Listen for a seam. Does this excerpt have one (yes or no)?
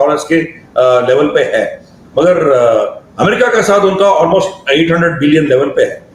no